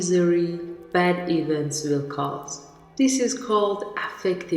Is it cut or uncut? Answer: uncut